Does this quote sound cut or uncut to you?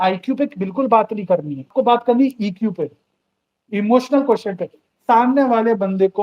cut